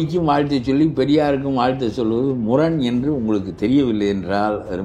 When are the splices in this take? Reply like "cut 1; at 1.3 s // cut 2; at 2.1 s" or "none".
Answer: none